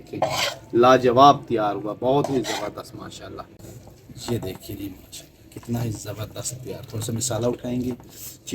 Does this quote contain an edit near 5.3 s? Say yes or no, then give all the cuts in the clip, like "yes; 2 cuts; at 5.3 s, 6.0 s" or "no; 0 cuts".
no; 1 cut; at 3.6 s